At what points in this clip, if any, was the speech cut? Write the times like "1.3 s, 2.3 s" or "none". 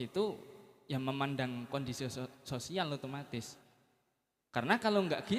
none